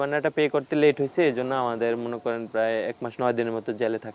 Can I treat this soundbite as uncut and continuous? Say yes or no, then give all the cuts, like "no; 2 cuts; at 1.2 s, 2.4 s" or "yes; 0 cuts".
yes; 0 cuts